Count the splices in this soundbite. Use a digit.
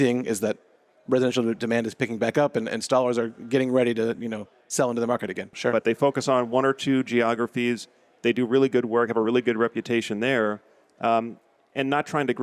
1